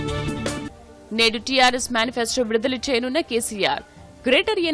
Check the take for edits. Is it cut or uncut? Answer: uncut